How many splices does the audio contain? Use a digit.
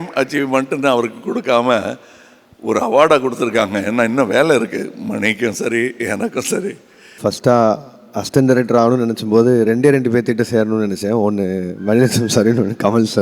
1